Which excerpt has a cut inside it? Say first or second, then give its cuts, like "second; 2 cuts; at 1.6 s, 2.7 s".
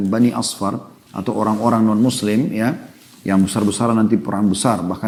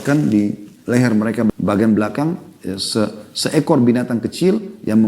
second; 1 cut; at 1.5 s